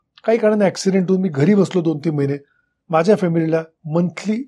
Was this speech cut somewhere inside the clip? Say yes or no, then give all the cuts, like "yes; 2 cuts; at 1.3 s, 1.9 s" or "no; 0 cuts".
no; 0 cuts